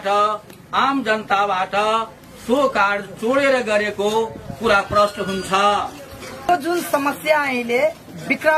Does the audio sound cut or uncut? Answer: cut